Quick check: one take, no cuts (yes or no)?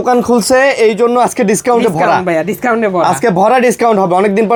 yes